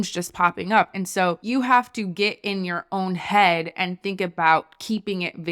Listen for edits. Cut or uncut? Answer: cut